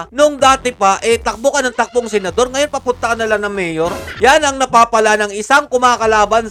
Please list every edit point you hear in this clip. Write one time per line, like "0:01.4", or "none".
none